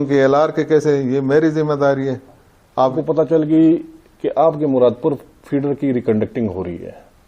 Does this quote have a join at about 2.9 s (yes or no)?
yes